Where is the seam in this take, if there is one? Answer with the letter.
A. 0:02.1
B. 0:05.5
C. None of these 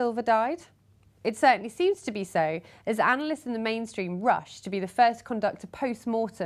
B